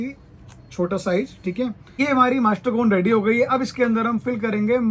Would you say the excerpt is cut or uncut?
cut